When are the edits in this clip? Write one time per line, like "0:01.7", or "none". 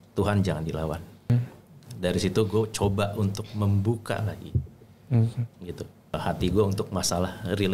0:01.3
0:06.1